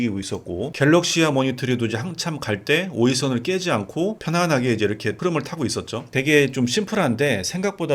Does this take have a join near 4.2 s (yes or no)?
yes